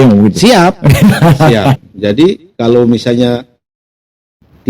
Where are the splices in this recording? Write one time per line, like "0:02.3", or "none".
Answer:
0:01.9